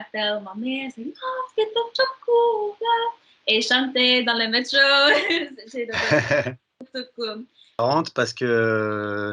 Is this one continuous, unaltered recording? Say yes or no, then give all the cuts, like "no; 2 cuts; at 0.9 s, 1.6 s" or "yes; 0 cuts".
no; 1 cut; at 7.8 s